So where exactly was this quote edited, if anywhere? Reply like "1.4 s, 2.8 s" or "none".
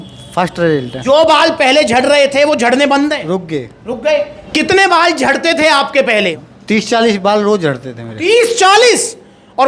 0.9 s, 6.4 s